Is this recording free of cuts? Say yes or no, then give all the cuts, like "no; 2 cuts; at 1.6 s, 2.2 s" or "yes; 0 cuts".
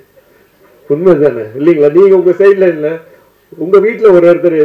yes; 0 cuts